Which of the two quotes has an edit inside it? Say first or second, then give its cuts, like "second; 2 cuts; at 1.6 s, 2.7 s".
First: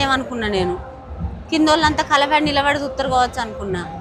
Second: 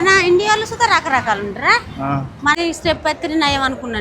second; 1 cut; at 2.6 s